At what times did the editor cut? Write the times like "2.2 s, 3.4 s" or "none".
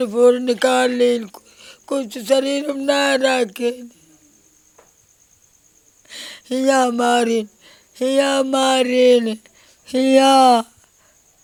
none